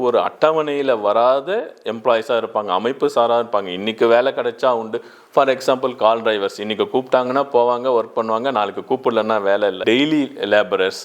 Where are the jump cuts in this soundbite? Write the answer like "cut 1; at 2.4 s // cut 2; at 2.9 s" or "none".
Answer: cut 1; at 9.8 s

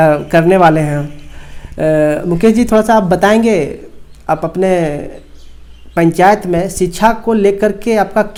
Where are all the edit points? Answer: none

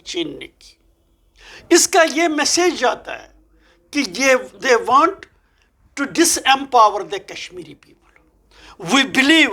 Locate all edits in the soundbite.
none

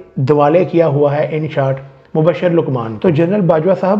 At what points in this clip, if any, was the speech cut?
cut 1; at 2.9 s

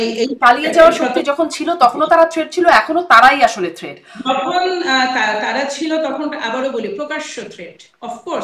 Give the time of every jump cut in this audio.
none

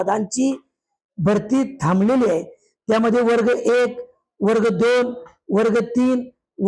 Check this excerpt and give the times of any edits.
none

